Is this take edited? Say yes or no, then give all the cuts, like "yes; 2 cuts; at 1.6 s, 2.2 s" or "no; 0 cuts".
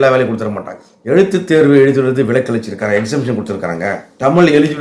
yes; 1 cut; at 0.9 s